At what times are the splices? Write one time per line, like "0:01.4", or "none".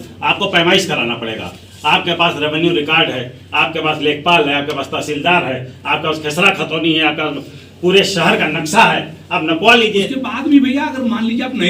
none